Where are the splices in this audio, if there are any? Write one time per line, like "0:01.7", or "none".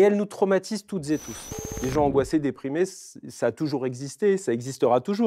0:01.5

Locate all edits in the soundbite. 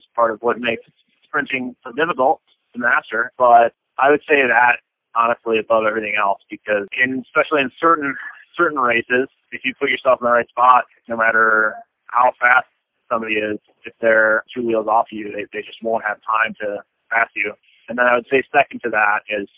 0:17.7

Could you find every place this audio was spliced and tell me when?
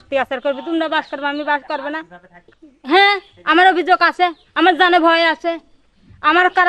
none

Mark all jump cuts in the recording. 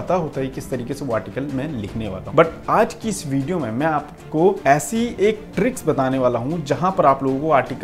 0:01.9
0:04.6

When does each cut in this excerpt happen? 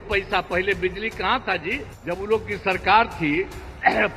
0:01.9

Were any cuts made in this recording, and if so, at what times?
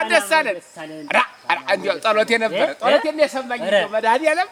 none

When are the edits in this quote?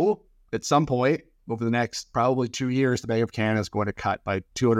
none

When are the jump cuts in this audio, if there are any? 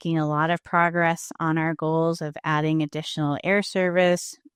none

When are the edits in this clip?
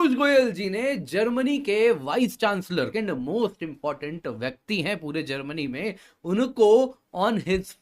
0:02.9

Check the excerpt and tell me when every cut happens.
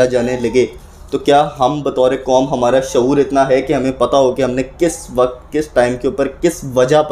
none

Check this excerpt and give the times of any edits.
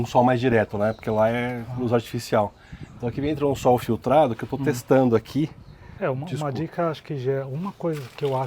0:05.9

